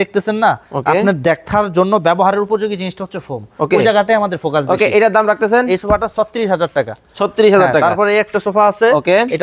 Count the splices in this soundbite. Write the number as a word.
zero